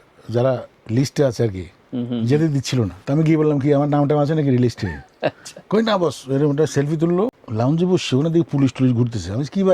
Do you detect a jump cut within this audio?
yes; 2 cuts; at 3.0 s, 7.4 s

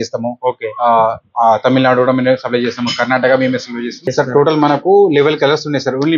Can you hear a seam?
yes; 1 cut; at 4.1 s

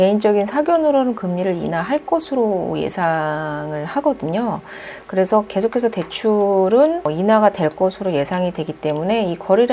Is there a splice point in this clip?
no; 0 cuts

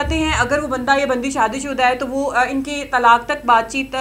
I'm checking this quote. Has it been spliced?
no; 0 cuts

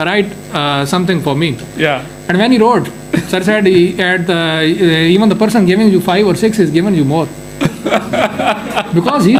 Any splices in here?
no; 0 cuts

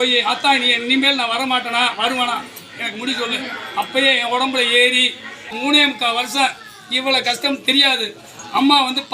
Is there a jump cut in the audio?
yes; 1 cut; at 5.5 s

